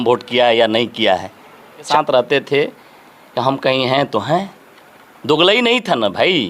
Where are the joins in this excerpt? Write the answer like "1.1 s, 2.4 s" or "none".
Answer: 1.9 s